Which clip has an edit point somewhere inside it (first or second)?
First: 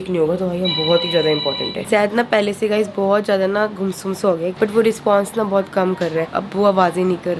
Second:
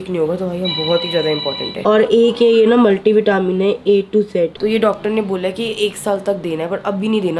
first